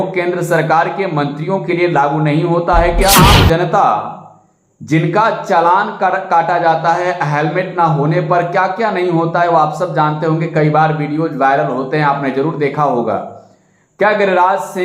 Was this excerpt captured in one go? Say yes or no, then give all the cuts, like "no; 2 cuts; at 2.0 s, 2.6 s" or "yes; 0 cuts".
no; 1 cut; at 3.1 s